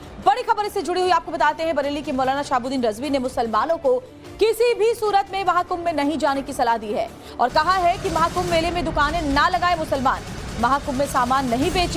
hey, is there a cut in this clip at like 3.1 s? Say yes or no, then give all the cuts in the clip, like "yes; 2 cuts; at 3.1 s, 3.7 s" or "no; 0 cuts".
yes; 1 cut; at 3.1 s